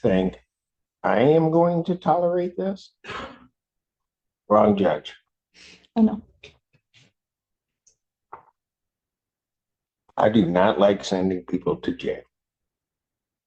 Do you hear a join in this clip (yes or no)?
no